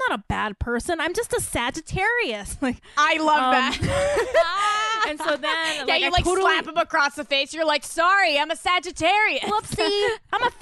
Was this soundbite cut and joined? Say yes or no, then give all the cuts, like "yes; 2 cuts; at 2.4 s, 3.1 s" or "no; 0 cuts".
no; 0 cuts